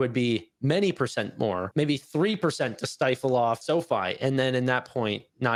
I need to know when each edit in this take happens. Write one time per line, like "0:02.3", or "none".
none